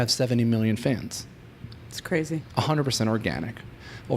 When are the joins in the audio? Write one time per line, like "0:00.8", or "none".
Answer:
0:02.4